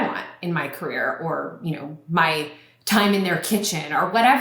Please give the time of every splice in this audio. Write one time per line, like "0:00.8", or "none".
none